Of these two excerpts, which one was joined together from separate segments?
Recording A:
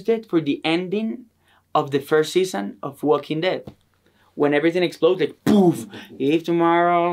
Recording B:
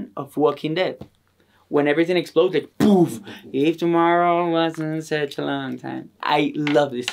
B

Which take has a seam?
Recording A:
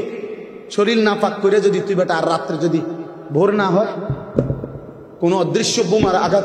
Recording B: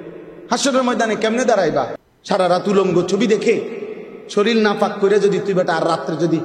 B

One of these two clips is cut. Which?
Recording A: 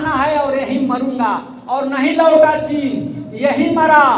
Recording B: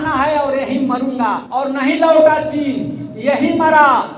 B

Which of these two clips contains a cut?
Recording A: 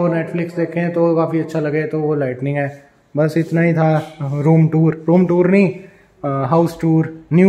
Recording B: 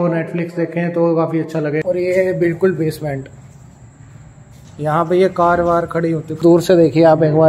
B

